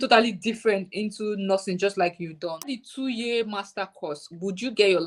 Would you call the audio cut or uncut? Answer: cut